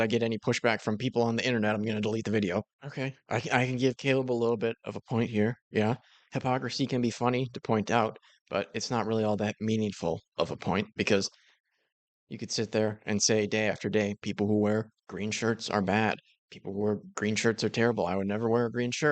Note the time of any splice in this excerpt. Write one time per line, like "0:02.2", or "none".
0:02.8